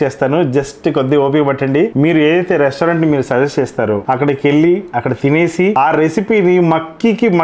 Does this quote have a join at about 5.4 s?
no; 1 cut; at 1.9 s

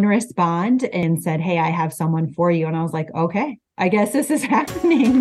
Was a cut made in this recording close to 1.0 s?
yes; 1 cut; at 1.0 s

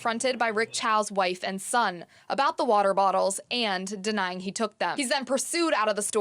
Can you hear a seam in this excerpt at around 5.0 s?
yes; 1 cut; at 5.0 s

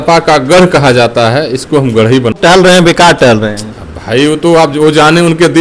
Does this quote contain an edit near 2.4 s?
yes; 1 cut; at 2.4 s

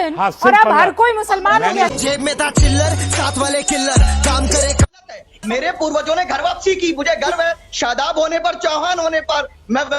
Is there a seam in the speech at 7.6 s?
no; 1 cut; at 4.9 s

